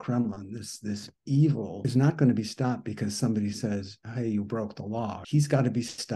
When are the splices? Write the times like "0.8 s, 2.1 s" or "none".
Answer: 1.9 s, 5.2 s